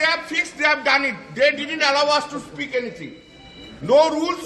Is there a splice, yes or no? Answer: no